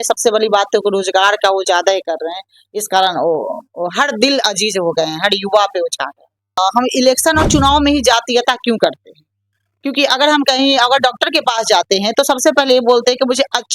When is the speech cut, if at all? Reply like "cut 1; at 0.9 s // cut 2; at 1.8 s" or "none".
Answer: cut 1; at 6.6 s